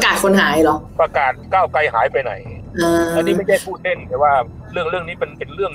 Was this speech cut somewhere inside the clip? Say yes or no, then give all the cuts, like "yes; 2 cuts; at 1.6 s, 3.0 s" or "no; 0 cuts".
yes; 1 cut; at 1.0 s